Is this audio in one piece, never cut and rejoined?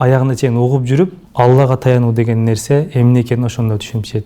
no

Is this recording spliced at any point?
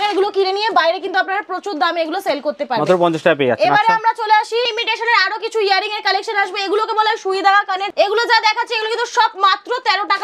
no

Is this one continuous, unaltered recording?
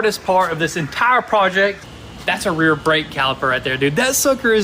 no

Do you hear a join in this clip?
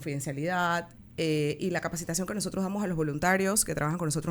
yes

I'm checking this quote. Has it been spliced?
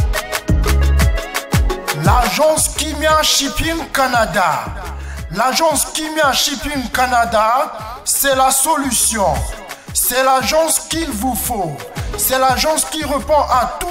yes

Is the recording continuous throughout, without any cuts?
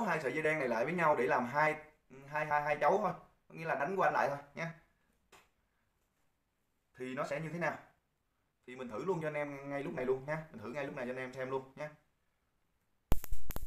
yes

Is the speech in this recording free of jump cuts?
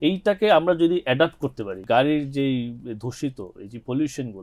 no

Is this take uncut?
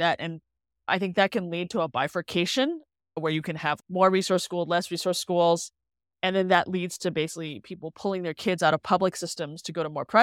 yes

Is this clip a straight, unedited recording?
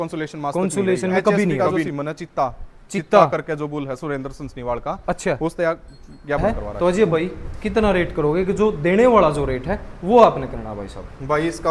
no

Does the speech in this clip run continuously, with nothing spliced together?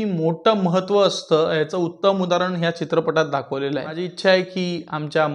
no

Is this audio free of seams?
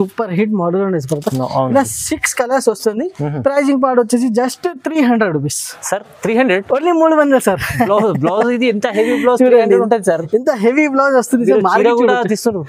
yes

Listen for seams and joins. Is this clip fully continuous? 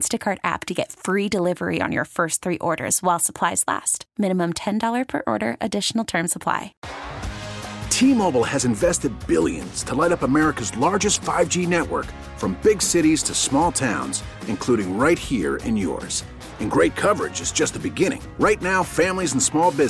no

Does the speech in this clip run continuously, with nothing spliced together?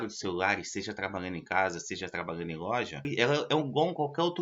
no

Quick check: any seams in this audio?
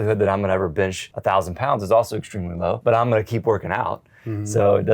yes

